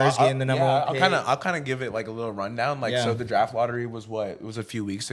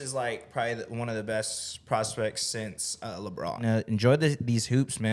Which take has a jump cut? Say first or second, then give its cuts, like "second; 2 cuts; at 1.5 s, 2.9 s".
second; 1 cut; at 3.6 s